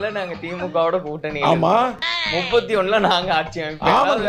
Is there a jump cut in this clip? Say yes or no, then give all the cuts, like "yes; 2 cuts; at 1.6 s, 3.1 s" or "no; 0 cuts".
no; 0 cuts